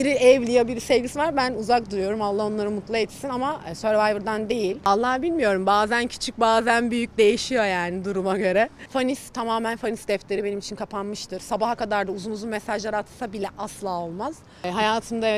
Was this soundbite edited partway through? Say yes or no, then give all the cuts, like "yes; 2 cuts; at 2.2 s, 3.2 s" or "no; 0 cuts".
yes; 3 cuts; at 4.9 s, 8.8 s, 14.6 s